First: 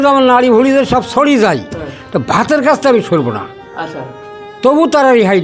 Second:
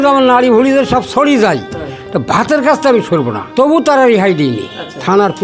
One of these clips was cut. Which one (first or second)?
second